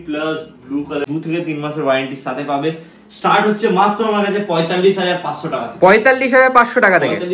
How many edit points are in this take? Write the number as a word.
one